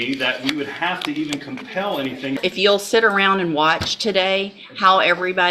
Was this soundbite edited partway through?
yes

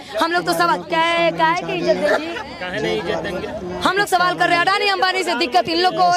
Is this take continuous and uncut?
yes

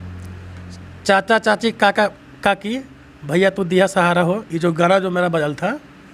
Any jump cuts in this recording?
no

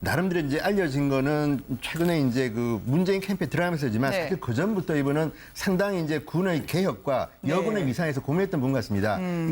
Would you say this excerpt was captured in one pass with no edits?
no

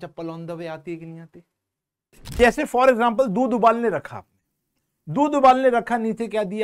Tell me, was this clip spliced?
yes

